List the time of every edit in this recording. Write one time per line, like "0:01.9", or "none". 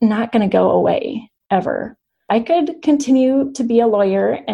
0:02.3